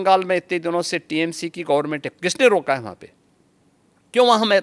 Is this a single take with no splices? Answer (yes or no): yes